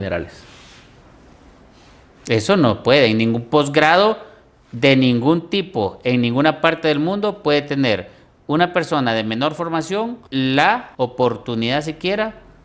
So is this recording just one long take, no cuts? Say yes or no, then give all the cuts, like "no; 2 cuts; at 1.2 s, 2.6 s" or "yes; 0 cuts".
no; 2 cuts; at 10.2 s, 10.9 s